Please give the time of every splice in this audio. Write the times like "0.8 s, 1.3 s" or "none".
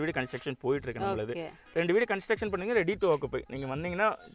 none